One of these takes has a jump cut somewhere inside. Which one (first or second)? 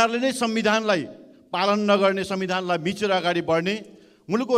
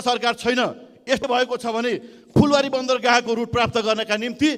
second